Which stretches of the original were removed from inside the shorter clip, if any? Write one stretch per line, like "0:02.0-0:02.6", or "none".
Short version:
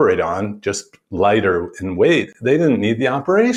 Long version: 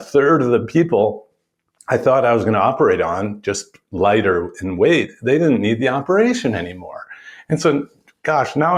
none

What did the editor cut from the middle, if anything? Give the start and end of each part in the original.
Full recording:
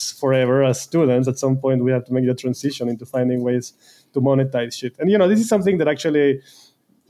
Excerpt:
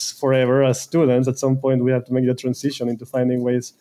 none

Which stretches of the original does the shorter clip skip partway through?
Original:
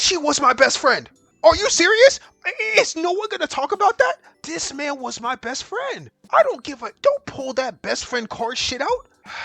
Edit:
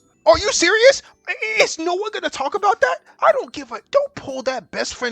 0:04.2-0:06.2

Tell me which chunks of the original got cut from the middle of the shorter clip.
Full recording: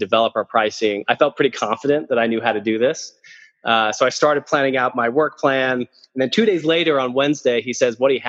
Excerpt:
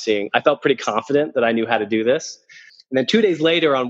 0:03.5-0:06.0

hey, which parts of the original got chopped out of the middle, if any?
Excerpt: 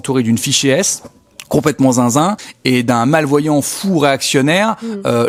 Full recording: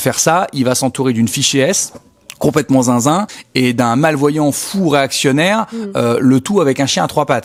none

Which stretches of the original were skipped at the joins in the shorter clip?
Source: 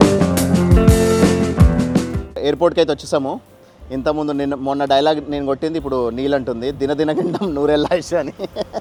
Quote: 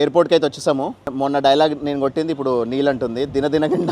0:03.6-0:04.6

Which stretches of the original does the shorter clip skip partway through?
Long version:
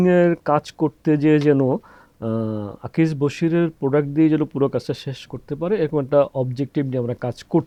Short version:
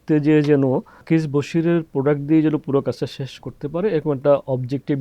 0:01.9-0:02.8

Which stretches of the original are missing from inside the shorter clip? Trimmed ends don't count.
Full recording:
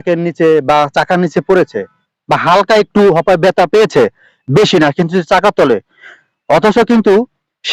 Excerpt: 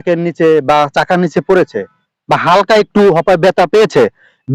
none

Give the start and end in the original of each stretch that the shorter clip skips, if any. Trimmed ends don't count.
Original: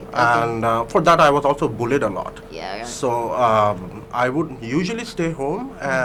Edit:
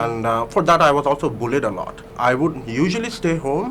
0:02.4-0:04.0

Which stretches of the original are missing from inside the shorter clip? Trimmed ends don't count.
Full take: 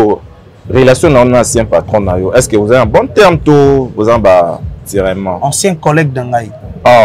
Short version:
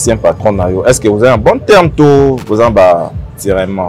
none

